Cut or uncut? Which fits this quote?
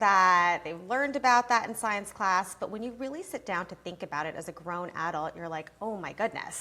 uncut